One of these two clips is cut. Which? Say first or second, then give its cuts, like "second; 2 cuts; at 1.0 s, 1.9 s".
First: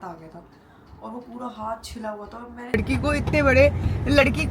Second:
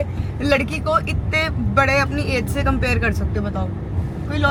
first; 1 cut; at 2.7 s